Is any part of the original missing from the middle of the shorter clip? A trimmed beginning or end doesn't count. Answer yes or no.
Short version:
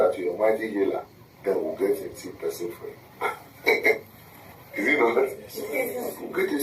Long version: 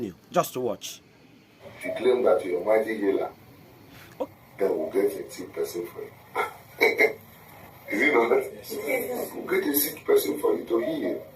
yes